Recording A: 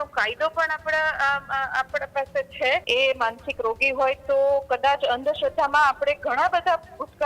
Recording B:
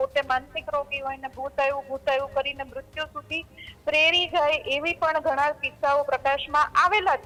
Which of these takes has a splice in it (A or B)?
A